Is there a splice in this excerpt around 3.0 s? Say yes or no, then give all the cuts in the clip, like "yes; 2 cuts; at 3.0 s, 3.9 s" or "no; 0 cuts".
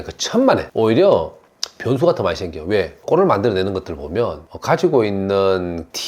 yes; 1 cut; at 3.0 s